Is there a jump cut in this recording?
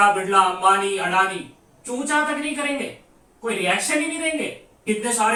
no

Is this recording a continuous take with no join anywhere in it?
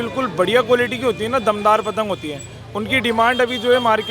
yes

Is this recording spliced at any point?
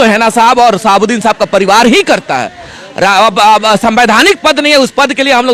no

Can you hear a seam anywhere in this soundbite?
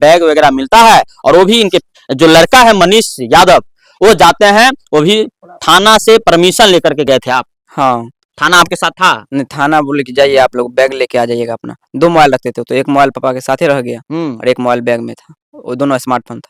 no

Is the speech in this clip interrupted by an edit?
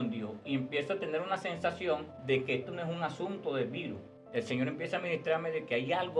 no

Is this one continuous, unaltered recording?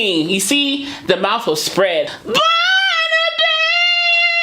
no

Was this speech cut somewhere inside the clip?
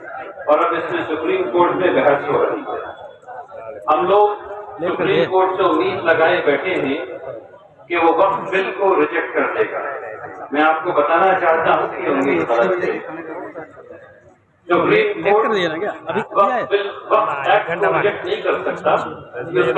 no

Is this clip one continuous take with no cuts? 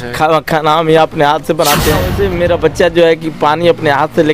no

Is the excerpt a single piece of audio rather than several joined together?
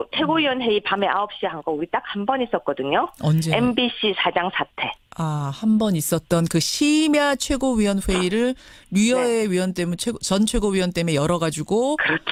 yes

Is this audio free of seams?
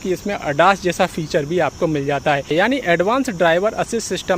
no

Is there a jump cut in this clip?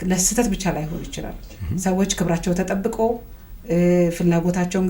no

